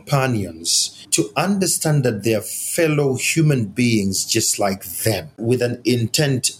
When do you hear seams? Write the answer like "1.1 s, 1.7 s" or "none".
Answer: 5.4 s